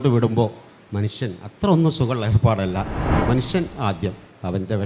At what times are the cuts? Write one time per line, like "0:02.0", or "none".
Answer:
0:03.1